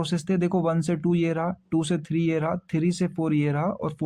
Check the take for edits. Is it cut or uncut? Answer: uncut